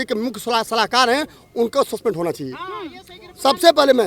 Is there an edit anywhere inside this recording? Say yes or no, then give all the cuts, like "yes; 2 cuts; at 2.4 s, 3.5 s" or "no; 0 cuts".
no; 0 cuts